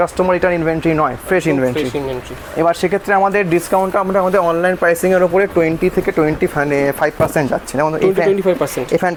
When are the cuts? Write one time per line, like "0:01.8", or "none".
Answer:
none